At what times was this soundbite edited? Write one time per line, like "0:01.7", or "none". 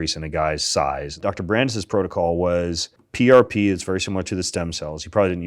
0:01.2
0:03.0